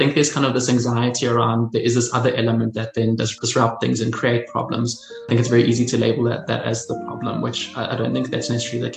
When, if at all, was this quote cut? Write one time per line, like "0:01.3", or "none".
0:03.3